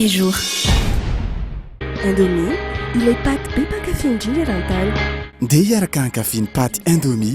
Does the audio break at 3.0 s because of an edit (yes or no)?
no